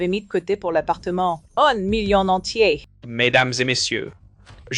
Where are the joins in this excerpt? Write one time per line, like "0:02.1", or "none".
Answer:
0:03.0